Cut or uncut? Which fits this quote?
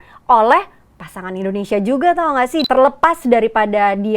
cut